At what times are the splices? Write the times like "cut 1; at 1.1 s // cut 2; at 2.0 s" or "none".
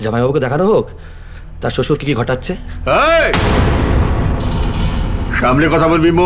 none